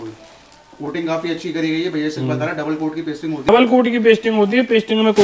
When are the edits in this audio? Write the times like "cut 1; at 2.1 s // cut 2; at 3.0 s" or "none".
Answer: cut 1; at 3.5 s

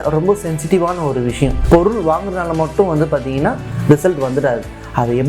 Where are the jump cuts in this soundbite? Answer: cut 1; at 1.6 s

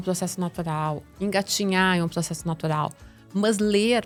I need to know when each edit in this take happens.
none

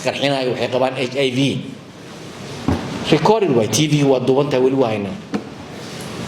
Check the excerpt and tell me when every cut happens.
none

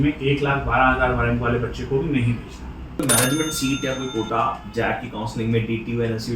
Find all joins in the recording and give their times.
cut 1; at 3.0 s

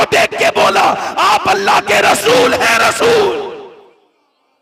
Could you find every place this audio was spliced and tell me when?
none

